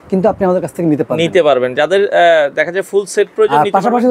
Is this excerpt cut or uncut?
uncut